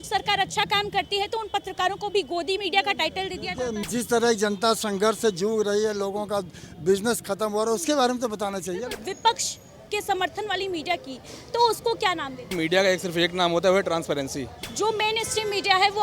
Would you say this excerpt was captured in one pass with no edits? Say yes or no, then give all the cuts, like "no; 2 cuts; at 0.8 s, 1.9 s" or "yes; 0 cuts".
no; 4 cuts; at 3.8 s, 8.9 s, 12.5 s, 14.6 s